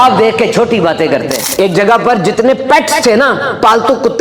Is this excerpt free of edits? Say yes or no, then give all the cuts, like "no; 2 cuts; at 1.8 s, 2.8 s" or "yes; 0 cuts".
no; 1 cut; at 1.4 s